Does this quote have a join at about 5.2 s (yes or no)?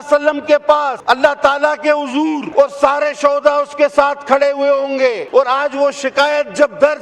yes